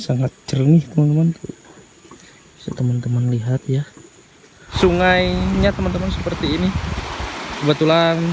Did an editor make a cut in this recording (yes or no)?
yes